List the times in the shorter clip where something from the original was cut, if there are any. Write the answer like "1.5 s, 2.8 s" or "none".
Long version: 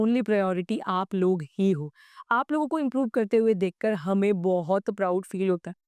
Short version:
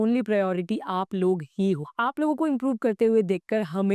1.9 s